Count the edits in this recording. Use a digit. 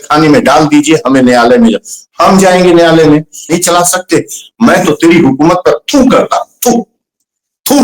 1